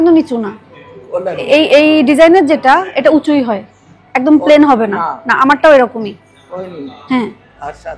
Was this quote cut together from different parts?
no; 0 cuts

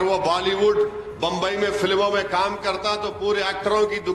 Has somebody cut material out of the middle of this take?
no; 0 cuts

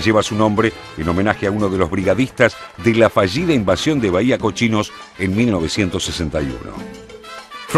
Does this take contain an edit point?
no; 0 cuts

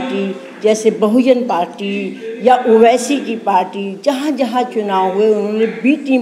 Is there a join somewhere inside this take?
no; 0 cuts

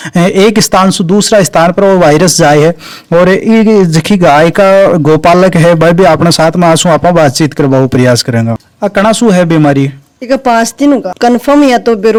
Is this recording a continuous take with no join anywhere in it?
yes; 0 cuts

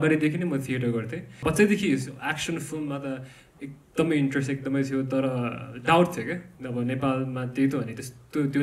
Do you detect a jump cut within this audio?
yes; 1 cut; at 1.4 s

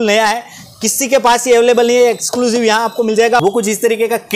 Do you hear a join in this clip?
yes; 1 cut; at 3.4 s

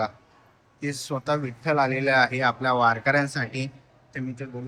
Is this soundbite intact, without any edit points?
yes; 0 cuts

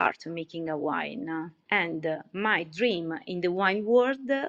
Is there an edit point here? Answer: no; 0 cuts

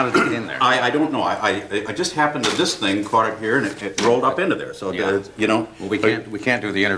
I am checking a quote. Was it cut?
no; 0 cuts

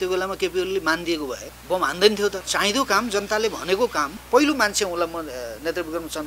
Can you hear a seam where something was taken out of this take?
yes; 3 cuts; at 1.5 s, 2.4 s, 4.2 s

